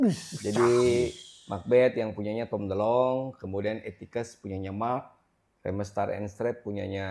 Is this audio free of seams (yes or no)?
yes